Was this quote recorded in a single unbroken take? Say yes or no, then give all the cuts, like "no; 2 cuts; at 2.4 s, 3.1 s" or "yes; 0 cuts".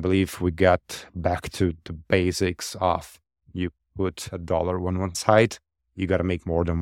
yes; 0 cuts